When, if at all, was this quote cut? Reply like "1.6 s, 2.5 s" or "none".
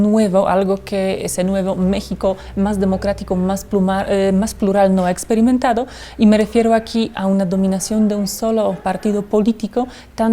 none